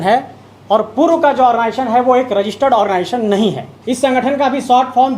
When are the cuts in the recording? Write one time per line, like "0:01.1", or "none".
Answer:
0:03.7